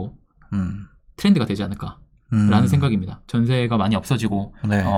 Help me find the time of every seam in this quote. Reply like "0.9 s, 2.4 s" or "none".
none

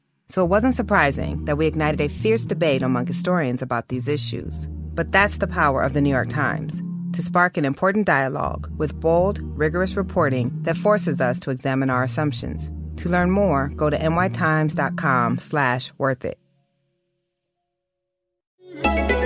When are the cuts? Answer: none

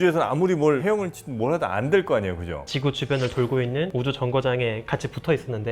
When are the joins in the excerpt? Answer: 2.6 s

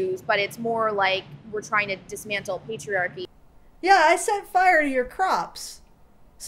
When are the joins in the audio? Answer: 3.2 s

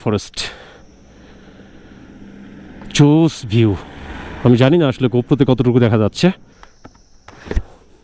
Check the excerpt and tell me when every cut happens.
6.5 s

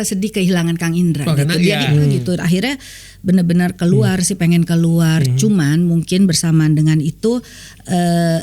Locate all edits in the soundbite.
2.2 s

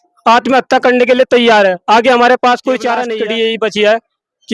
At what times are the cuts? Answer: 3.0 s

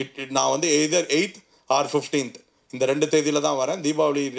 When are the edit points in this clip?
none

